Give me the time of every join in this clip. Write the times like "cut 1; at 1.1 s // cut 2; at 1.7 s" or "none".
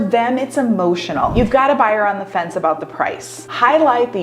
cut 1; at 1.3 s